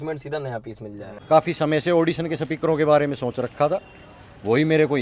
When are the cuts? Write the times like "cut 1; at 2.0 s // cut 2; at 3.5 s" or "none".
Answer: cut 1; at 1.2 s